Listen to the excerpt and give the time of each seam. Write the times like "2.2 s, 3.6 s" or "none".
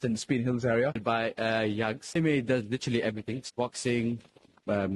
1.0 s, 2.2 s, 3.5 s